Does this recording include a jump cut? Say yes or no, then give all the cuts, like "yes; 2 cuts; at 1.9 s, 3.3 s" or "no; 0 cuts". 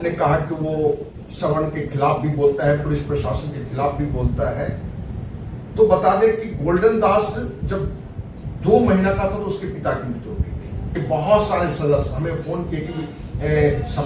yes; 1 cut; at 10.9 s